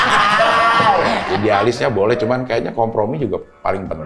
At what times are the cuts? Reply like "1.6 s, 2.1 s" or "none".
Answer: 1.3 s